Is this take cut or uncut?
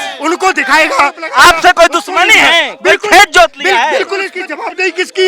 cut